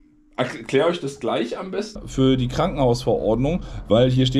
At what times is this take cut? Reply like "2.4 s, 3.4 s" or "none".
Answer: 2.0 s